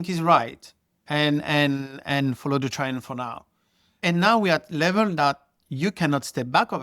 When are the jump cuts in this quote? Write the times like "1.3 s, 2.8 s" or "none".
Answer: 4.0 s